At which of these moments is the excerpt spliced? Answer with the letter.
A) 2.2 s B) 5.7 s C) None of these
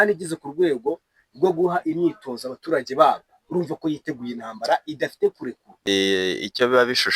B